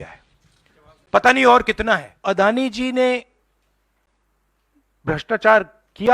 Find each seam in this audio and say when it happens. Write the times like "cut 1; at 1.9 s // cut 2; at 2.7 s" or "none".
cut 1; at 2.1 s